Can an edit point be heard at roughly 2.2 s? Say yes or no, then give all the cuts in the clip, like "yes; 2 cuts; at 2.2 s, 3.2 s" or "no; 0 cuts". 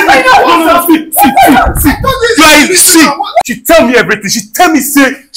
no; 1 cut; at 3.4 s